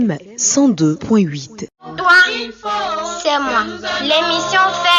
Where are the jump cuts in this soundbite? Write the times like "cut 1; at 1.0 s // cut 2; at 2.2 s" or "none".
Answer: cut 1; at 1.9 s